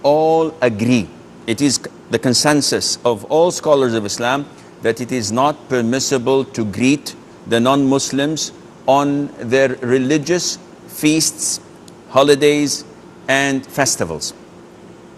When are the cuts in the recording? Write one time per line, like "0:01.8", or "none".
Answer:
0:05.5